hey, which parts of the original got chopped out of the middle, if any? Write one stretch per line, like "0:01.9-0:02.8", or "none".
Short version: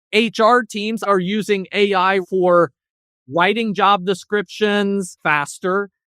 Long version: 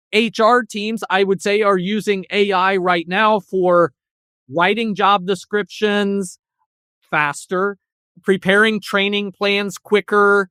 0:01.1-0:01.6
0:02.8-0:03.5
0:06.3-0:07.0